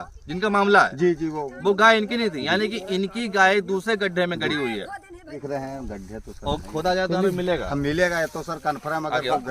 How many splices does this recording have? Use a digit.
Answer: 1